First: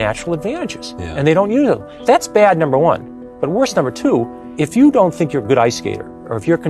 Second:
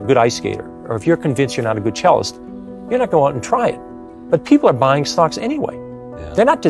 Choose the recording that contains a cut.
first; 2 cuts; at 1.9 s, 4.4 s

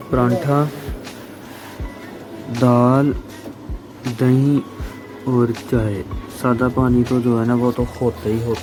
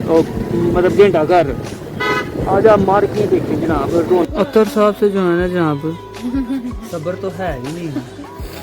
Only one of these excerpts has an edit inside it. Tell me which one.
second; 1 cut; at 4.2 s

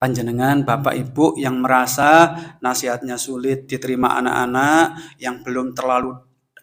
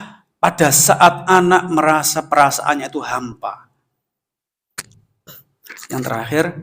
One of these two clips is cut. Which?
second; 1 cut; at 4.9 s

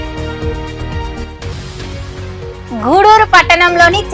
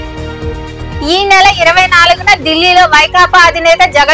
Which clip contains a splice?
second; 1 cut; at 1.0 s

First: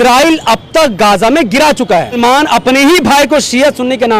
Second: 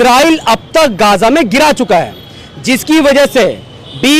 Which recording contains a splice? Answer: first; 1 cut; at 2.2 s

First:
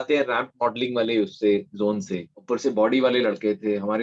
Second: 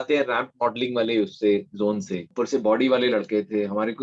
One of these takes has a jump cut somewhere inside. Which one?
second; 1 cut; at 2.2 s

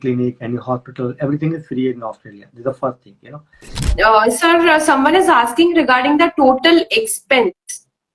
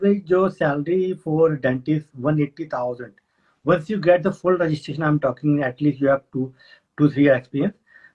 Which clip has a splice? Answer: first; 1 cut; at 3.9 s

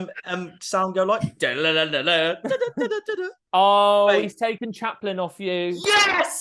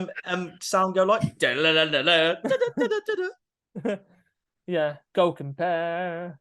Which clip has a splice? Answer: first; 1 cut; at 3.4 s

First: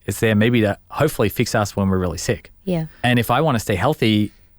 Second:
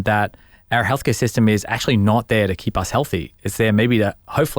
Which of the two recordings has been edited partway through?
first; 1 cut; at 3.0 s

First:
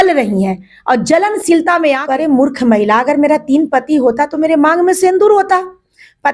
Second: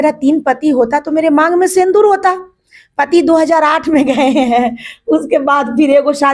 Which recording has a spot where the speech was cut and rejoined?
first; 1 cut; at 2.0 s

